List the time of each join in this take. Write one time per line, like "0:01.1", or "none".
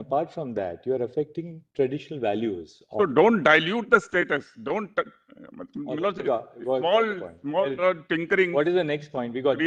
none